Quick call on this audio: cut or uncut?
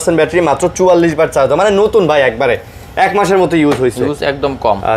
uncut